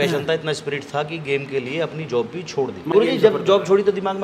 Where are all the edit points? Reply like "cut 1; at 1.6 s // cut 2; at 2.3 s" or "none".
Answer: cut 1; at 2.9 s